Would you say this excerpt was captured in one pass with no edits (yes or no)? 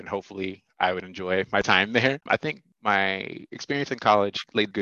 no